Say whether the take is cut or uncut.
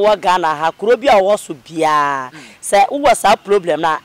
uncut